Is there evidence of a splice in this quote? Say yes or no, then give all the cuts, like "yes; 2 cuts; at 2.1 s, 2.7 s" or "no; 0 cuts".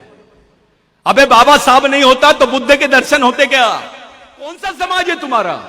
yes; 1 cut; at 4.6 s